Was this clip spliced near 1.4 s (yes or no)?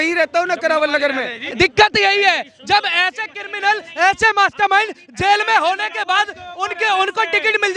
yes